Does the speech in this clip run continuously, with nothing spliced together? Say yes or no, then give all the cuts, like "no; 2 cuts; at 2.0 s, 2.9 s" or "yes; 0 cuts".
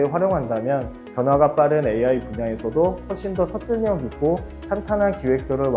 no; 1 cut; at 1.0 s